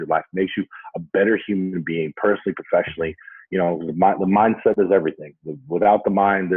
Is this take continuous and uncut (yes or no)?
yes